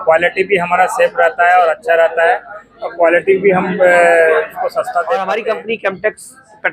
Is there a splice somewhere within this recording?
yes; 1 cut; at 5.1 s

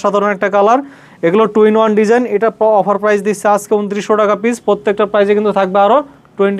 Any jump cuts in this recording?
no; 0 cuts

